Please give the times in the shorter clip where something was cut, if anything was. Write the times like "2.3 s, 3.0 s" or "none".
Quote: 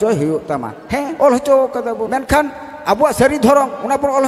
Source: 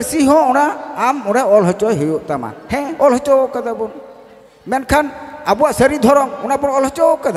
2.1 s